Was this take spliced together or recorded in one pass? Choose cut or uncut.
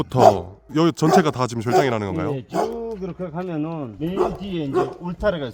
uncut